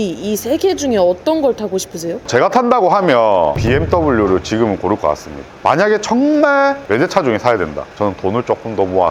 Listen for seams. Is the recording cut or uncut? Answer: cut